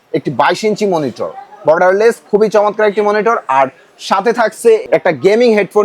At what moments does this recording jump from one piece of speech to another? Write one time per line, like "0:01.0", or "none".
0:04.8

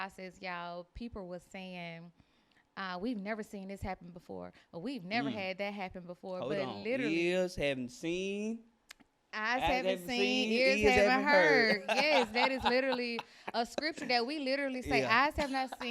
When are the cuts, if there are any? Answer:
none

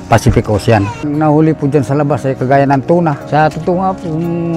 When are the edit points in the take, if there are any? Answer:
0:00.9

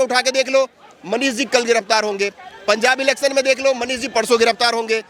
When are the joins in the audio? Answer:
none

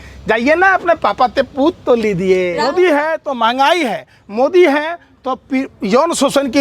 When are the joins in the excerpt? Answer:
0:02.6

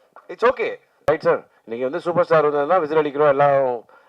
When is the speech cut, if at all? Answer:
0:01.1

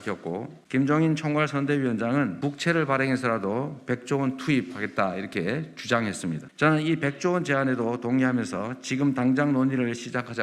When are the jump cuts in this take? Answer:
none

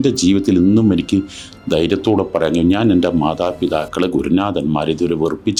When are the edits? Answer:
none

